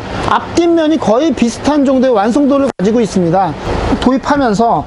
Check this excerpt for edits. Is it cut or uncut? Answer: cut